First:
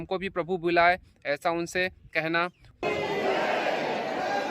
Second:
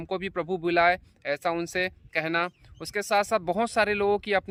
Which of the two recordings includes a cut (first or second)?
first